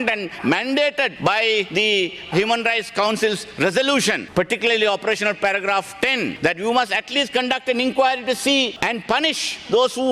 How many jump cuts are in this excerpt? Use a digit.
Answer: 4